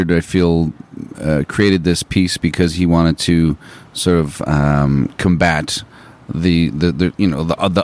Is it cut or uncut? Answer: uncut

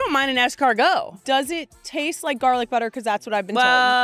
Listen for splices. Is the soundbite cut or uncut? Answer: cut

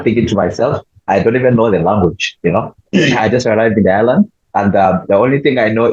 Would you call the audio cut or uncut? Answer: uncut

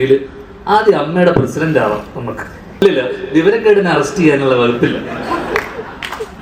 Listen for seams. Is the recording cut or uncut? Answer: cut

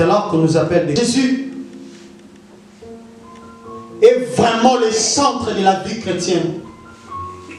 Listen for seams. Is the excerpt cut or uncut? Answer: cut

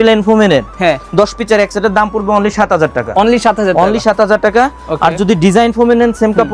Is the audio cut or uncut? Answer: uncut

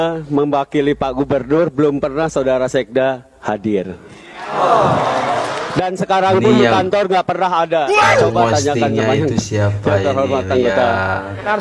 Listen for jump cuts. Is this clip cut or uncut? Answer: uncut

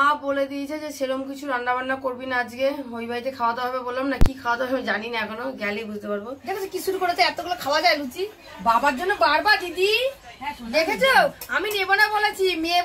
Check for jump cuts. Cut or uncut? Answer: cut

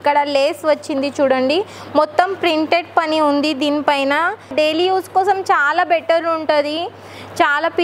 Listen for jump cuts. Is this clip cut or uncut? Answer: cut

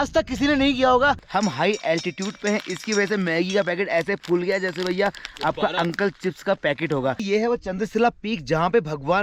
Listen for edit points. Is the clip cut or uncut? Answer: cut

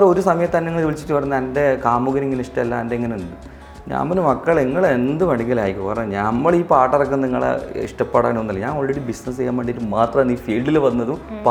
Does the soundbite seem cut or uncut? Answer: uncut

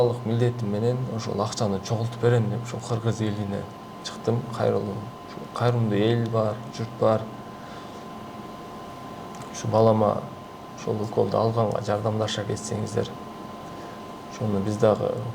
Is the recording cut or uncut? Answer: uncut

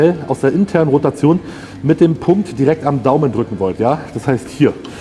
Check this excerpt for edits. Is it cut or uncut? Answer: uncut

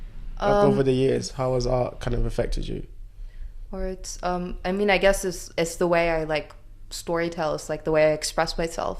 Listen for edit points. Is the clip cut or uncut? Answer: uncut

